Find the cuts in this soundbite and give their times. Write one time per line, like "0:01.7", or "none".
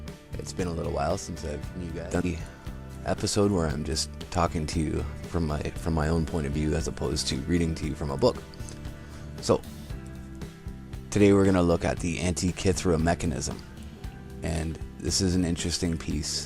0:03.7